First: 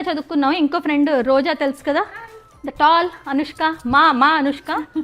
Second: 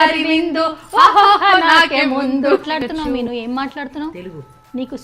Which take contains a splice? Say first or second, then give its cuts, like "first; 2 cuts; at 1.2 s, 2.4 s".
second; 1 cut; at 2.7 s